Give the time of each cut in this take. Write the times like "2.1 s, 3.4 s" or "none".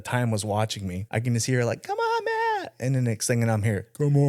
1.0 s